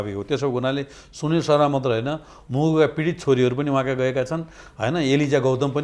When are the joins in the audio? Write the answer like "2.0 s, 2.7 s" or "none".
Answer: none